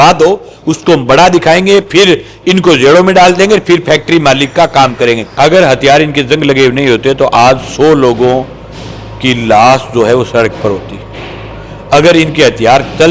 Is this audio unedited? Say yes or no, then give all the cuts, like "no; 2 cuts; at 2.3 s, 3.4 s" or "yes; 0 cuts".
yes; 0 cuts